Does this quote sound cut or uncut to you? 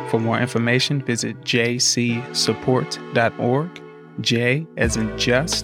uncut